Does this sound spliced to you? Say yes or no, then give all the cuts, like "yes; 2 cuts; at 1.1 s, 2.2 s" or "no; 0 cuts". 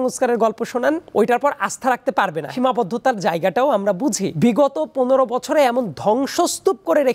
yes; 3 cuts; at 1.0 s, 2.4 s, 4.3 s